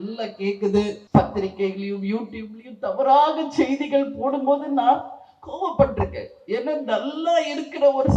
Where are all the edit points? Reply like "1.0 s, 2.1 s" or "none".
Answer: 1.0 s